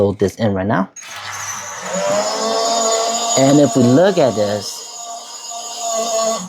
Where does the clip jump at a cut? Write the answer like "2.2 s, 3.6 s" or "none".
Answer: 0.9 s